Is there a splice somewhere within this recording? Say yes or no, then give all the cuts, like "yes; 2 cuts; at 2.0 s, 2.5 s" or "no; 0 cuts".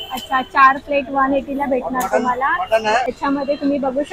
yes; 1 cut; at 3.1 s